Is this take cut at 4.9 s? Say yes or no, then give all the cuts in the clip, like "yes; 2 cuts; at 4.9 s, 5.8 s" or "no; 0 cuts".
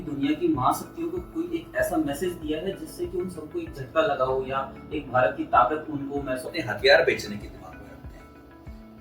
no; 1 cut; at 6.6 s